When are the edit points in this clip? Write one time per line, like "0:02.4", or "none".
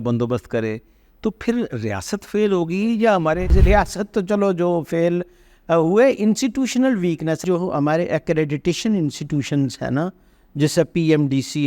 0:03.5
0:07.4

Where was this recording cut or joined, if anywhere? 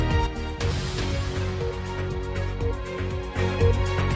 none

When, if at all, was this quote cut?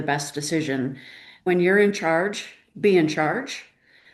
0:01.4

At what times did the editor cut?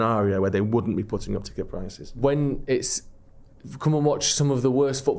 0:02.0

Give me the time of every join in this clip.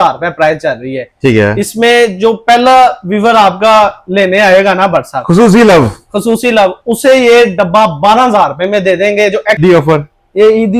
0:09.6

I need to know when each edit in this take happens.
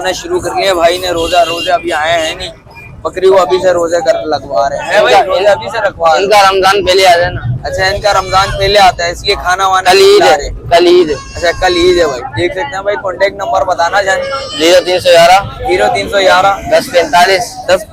none

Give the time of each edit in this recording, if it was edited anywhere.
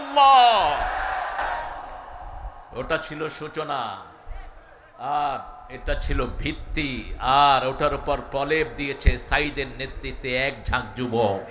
none

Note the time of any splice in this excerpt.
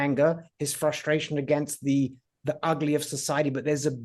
none

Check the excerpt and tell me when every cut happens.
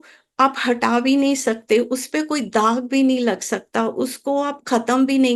none

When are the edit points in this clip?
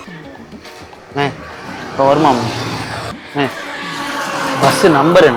0:03.1

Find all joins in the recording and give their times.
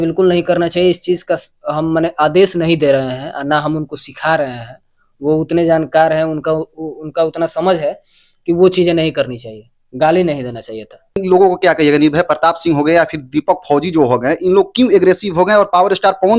0:11.2

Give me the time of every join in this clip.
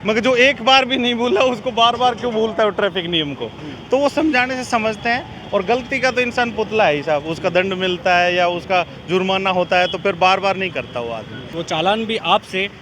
0:11.6

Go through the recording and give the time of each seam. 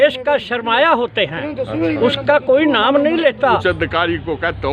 0:03.6

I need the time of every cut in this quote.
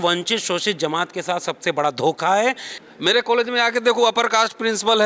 0:02.7

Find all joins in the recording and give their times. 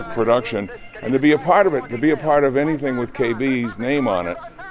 none

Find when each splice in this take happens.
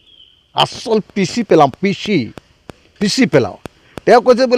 none

